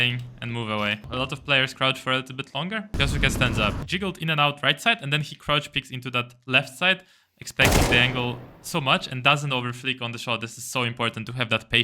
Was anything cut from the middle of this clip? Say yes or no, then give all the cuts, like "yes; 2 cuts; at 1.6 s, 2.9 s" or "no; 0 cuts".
yes; 3 cuts; at 1.1 s, 2.9 s, 3.8 s